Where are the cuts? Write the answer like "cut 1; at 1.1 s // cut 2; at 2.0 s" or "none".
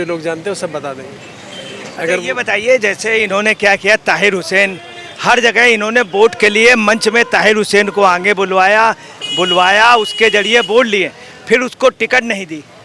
none